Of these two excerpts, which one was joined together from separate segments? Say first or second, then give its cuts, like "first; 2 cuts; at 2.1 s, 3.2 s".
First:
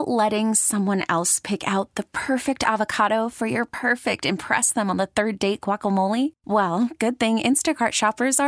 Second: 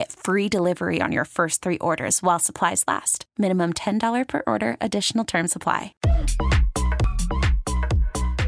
second; 2 cuts; at 5.9 s, 7.1 s